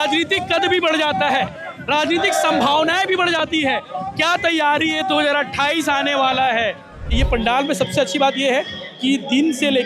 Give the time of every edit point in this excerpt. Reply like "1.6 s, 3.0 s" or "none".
7.2 s

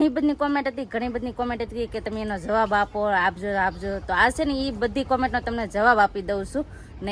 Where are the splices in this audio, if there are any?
none

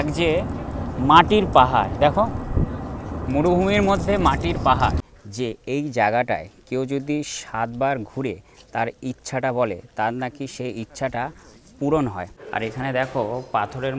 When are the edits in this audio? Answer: 5.1 s, 12.3 s

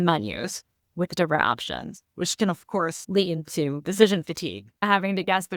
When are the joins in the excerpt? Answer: 3.0 s, 4.8 s

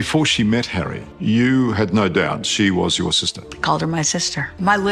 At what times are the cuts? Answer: none

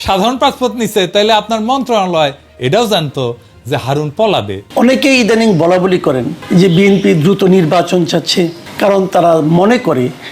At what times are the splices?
4.6 s, 6.3 s, 8.6 s

